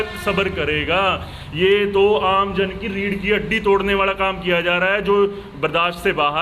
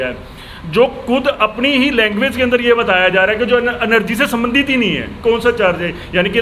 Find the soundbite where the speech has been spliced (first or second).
second